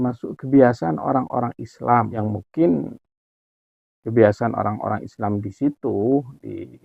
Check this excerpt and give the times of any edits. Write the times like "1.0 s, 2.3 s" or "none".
2.1 s